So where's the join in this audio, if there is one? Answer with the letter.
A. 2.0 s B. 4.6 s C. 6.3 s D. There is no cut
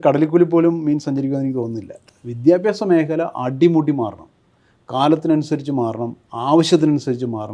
A